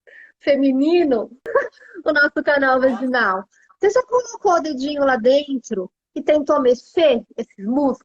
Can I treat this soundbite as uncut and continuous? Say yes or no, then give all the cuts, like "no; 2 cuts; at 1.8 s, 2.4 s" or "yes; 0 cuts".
no; 1 cut; at 1.4 s